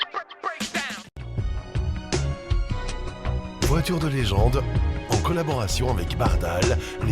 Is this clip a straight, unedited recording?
no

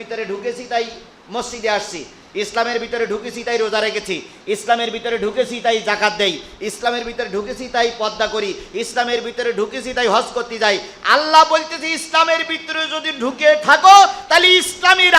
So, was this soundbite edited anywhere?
no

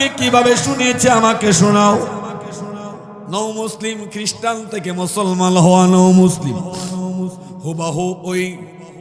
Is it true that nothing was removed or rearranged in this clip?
yes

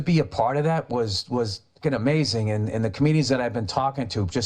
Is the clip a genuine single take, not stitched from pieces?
no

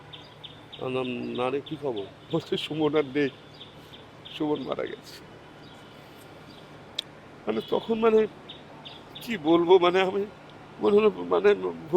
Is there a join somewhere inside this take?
yes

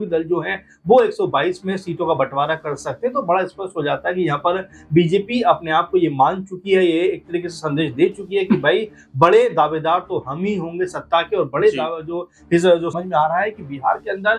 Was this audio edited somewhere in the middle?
yes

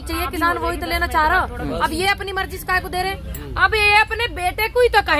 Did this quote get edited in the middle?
yes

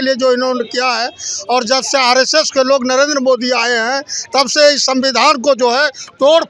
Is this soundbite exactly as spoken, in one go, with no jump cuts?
yes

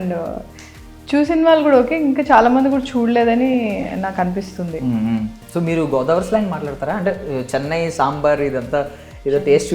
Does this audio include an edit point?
yes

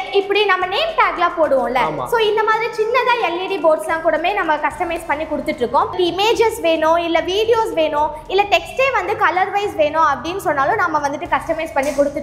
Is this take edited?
yes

